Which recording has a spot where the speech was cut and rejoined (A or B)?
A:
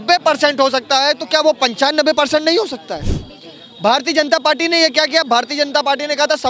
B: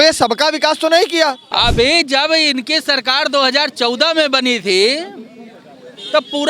B